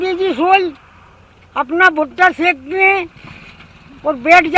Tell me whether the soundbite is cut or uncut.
uncut